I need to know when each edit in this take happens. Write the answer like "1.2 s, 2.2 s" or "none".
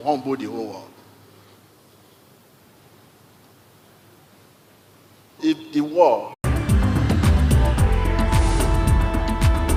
none